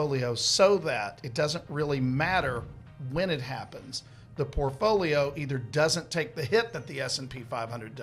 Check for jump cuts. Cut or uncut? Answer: uncut